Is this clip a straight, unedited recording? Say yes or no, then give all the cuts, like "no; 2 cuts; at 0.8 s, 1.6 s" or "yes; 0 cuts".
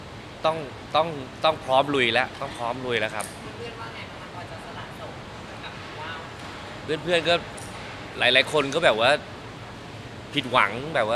yes; 0 cuts